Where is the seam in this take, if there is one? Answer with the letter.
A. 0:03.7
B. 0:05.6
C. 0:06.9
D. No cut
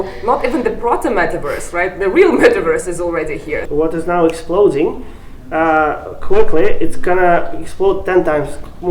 D